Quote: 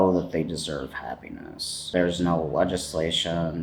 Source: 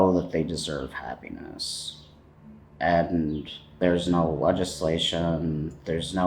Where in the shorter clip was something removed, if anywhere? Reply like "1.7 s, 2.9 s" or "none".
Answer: 1.7 s